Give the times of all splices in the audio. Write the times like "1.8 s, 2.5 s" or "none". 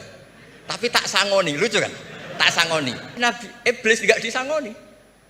3.1 s